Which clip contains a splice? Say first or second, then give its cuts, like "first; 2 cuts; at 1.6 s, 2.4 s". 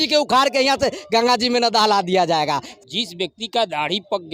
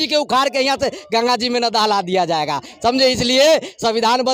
first; 1 cut; at 2.7 s